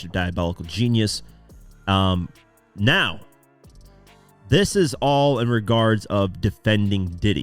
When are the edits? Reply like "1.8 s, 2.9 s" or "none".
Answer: none